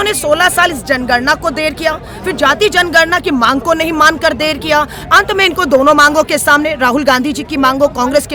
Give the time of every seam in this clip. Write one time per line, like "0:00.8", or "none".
none

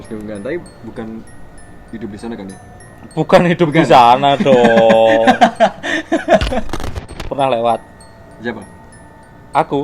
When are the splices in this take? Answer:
0:07.1

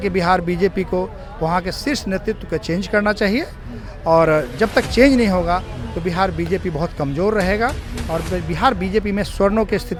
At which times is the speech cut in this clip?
none

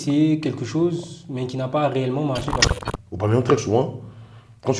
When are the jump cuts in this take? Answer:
0:02.8

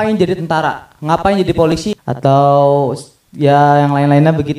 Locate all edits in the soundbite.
0:02.1

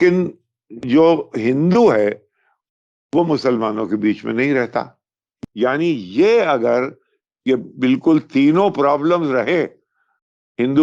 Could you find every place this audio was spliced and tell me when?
0:05.3

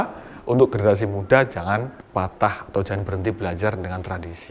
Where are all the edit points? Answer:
0:02.0

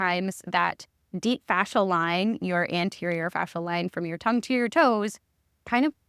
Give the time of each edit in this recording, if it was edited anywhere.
none

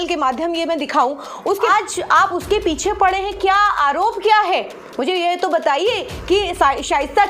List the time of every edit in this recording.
0:01.7

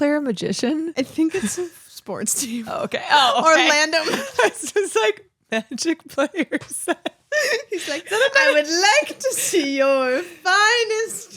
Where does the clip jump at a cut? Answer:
0:00.9

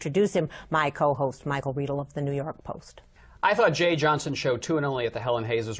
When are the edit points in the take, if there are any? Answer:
0:02.1

